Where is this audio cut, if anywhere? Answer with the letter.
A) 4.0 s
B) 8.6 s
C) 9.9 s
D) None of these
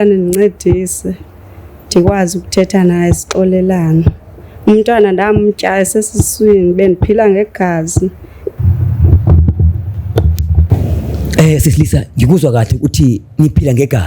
B